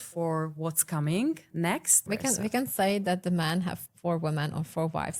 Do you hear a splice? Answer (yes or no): yes